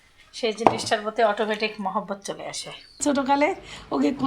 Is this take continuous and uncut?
no; 1 cut; at 3.0 s

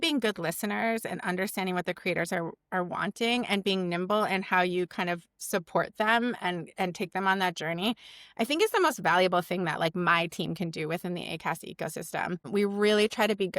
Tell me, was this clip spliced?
yes; 1 cut; at 12.5 s

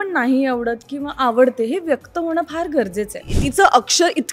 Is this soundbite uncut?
no; 1 cut; at 3.2 s

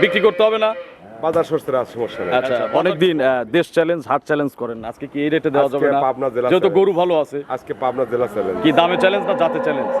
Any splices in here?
yes; 1 cut; at 2.7 s

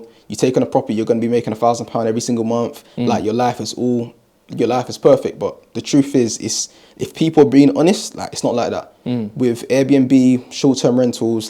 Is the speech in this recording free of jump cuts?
yes; 0 cuts

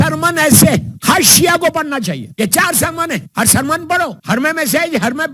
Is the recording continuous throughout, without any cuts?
no; 4 cuts; at 0.9 s, 2.2 s, 3.3 s, 4.2 s

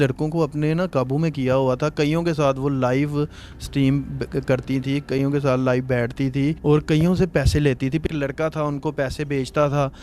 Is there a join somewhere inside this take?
no; 0 cuts

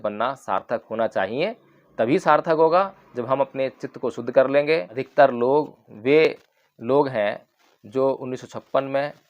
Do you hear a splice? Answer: yes; 1 cut; at 4.9 s

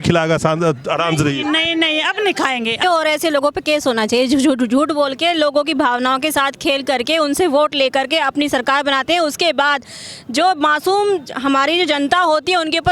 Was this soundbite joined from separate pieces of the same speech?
yes; 1 cut; at 2.8 s

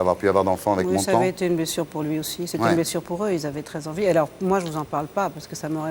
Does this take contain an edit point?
no; 0 cuts

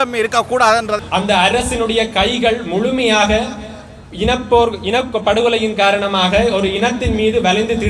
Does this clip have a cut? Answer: yes; 1 cut; at 1.0 s

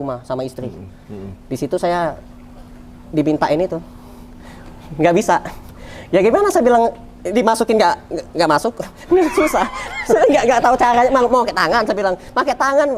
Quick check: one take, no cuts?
yes; 0 cuts

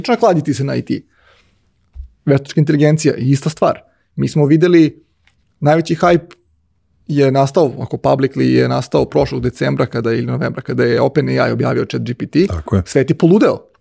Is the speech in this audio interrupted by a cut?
no; 0 cuts

